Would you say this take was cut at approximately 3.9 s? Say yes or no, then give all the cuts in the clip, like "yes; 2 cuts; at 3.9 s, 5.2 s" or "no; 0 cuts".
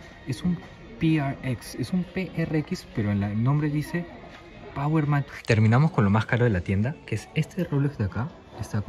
no; 1 cut; at 5.2 s